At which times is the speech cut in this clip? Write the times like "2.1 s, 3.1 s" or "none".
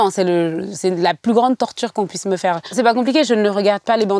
2.7 s